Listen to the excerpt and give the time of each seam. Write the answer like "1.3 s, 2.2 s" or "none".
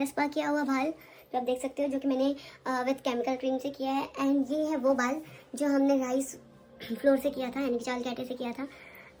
none